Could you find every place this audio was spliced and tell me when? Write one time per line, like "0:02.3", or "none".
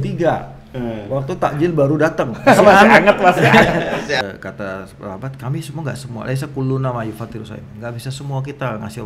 0:04.2